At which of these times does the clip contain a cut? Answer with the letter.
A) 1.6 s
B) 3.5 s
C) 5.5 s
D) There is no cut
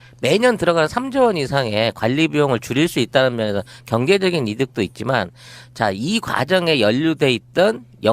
A